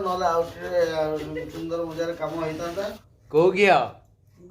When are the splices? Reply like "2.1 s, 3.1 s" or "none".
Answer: 3.0 s